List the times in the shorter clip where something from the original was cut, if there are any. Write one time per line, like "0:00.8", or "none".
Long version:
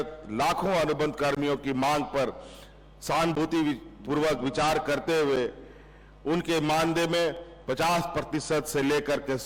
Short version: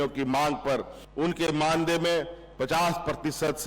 0:01.0